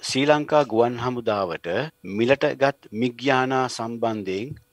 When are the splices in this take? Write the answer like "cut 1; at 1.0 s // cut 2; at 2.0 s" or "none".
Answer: cut 1; at 2.0 s